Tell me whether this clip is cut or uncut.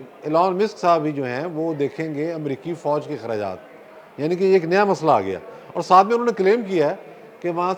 uncut